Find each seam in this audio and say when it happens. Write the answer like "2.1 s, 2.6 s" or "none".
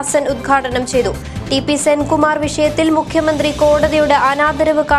none